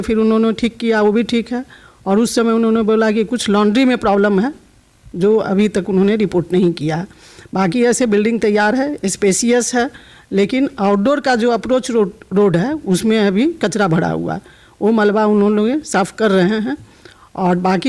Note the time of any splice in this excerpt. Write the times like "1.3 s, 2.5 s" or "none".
none